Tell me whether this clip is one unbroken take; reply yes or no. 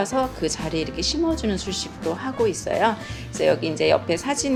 yes